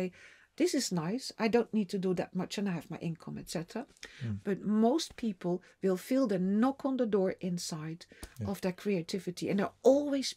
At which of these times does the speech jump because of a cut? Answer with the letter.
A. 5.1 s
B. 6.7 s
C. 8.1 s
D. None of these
D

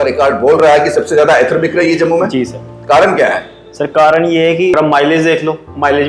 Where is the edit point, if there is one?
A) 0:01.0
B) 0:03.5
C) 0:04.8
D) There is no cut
C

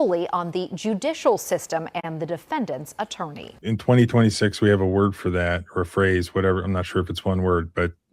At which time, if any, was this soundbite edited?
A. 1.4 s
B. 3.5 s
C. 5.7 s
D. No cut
B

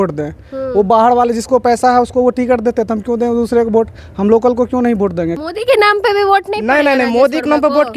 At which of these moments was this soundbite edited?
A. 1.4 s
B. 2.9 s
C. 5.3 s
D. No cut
C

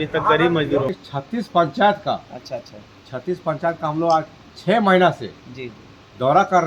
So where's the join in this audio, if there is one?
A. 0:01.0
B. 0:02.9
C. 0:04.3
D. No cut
A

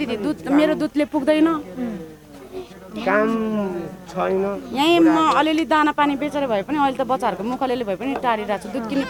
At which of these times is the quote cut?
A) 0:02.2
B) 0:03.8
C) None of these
C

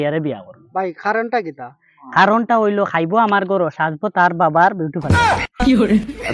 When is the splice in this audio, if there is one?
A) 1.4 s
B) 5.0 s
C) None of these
B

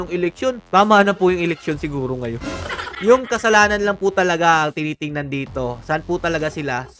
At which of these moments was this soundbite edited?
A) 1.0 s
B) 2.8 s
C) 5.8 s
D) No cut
B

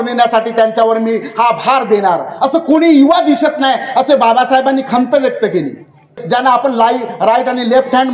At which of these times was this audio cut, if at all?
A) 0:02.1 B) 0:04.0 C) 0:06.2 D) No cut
C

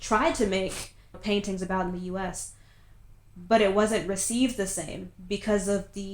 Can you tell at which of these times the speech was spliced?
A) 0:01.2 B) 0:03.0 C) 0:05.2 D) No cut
A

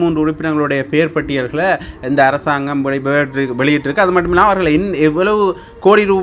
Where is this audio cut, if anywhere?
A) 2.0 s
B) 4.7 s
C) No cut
C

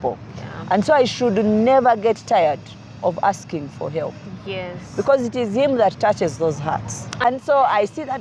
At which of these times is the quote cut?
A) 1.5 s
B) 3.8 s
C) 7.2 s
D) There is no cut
C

